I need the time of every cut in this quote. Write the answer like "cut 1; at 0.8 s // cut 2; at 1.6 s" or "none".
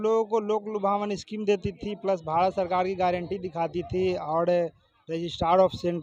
none